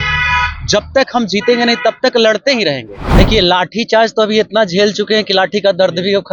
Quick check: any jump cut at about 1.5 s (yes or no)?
no